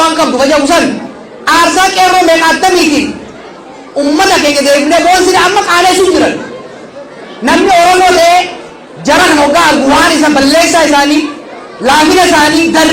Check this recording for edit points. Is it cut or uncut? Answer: uncut